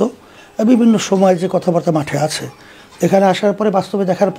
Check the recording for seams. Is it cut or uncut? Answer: uncut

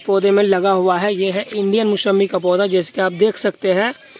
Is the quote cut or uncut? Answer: uncut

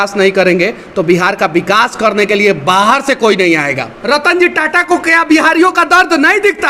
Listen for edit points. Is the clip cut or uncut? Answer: cut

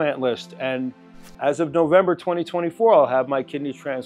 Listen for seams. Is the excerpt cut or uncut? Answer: uncut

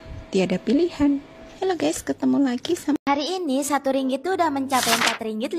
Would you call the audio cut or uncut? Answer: cut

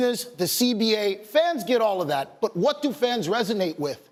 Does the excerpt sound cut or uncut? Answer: uncut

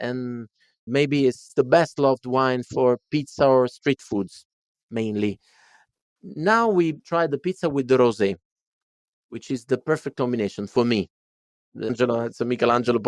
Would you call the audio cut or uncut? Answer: cut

